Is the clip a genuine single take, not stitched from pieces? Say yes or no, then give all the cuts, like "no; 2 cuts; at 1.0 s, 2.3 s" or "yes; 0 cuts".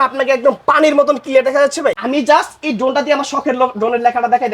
no; 1 cut; at 2.0 s